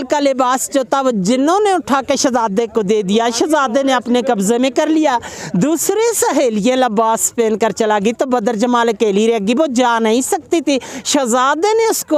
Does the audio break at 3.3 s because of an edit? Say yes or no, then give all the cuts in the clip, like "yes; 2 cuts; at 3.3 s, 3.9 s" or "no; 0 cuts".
no; 0 cuts